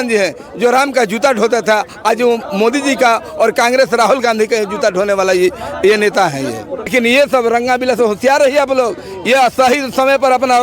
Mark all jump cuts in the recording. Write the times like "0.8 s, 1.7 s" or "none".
6.9 s